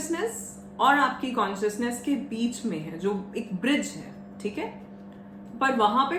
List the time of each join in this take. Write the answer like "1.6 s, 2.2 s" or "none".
none